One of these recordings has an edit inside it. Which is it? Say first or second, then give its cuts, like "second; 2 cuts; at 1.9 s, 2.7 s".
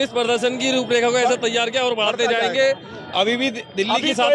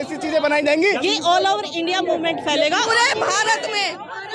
second; 2 cuts; at 1.0 s, 2.9 s